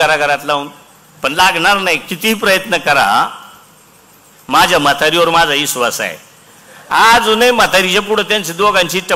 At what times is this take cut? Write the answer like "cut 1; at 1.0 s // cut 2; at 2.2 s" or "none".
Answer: none